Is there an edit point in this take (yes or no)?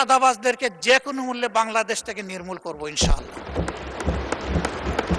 no